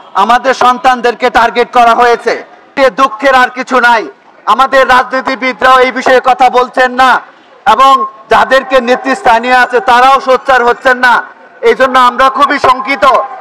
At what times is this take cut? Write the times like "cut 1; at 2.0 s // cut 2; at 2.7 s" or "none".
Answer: cut 1; at 2.7 s